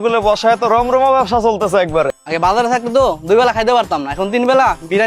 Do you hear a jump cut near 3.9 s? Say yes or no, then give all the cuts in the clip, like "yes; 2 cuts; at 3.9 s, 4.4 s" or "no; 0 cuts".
no; 1 cut; at 2.2 s